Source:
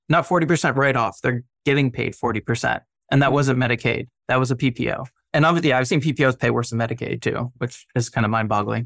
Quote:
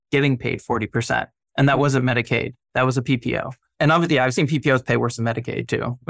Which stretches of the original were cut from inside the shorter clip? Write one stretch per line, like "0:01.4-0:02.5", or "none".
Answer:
none